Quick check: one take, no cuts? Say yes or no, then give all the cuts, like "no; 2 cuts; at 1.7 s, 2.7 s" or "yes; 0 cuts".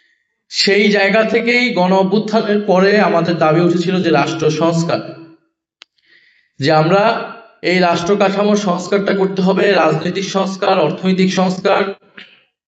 yes; 0 cuts